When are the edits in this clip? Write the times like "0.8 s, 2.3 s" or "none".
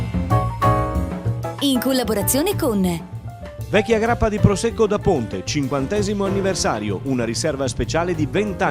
1.4 s